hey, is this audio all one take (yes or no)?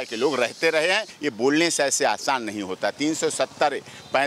no